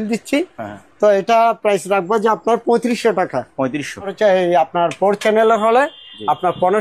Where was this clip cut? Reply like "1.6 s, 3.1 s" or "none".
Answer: 4.1 s

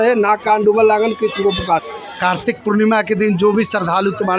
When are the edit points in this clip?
1.8 s

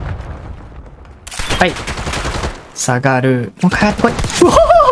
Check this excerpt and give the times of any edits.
none

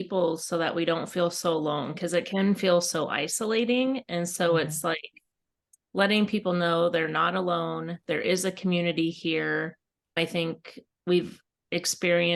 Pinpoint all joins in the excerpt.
none

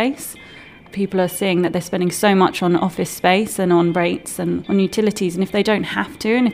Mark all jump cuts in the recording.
0.9 s, 4.6 s

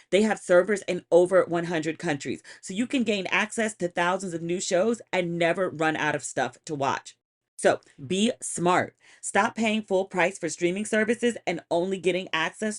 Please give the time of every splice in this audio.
7.4 s

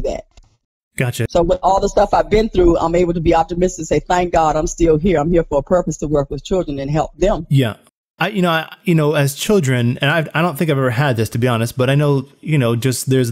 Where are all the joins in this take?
1.3 s, 7.8 s

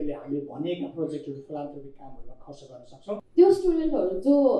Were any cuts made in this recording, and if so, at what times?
3.2 s

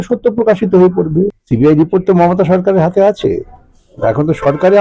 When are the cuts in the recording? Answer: 1.3 s

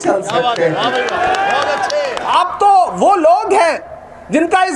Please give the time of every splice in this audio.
none

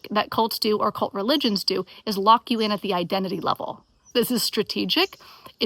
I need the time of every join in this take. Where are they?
4.0 s

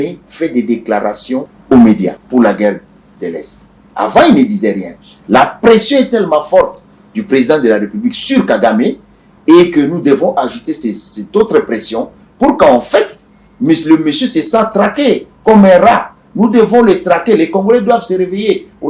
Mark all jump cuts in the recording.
1.5 s, 2.2 s

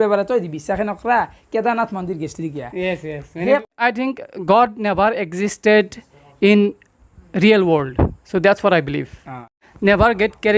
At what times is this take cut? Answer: 3.6 s, 9.6 s

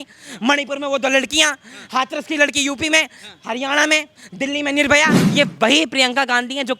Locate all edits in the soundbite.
5.2 s

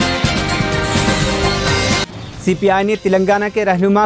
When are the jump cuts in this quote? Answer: 2.1 s

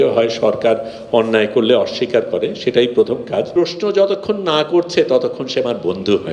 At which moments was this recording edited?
3.5 s

